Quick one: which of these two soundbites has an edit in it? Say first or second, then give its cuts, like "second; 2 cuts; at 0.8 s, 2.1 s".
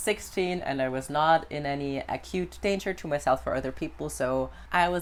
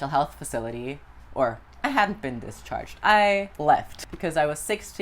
second; 1 cut; at 3.6 s